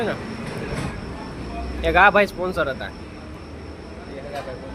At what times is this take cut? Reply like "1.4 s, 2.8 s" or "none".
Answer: none